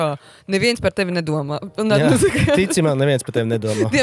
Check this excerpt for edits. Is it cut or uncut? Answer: uncut